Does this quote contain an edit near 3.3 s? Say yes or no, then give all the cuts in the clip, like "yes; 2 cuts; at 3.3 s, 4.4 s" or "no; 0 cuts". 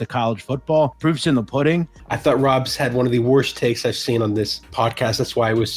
no; 3 cuts; at 1.0 s, 2.0 s, 4.6 s